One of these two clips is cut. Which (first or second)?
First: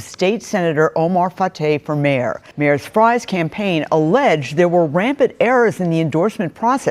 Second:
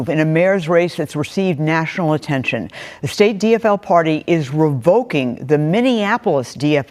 first